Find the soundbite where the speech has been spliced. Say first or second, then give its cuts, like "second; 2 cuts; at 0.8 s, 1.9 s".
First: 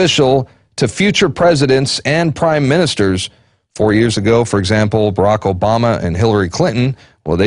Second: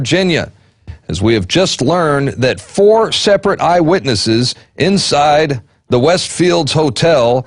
second; 1 cut; at 4.6 s